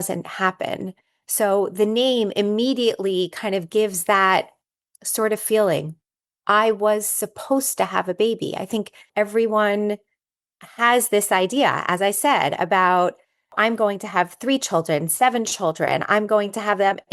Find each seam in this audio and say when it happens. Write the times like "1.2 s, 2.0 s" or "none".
9.1 s, 13.5 s